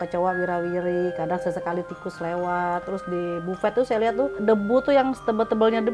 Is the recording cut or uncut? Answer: cut